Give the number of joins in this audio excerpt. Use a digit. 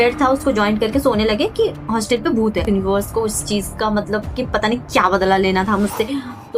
1